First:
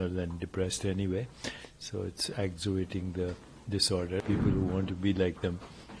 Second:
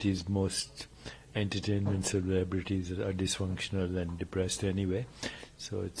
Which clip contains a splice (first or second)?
first